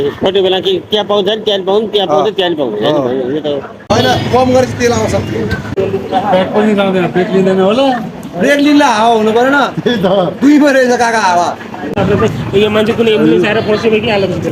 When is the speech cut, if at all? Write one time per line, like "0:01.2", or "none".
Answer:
0:03.9
0:05.7
0:12.0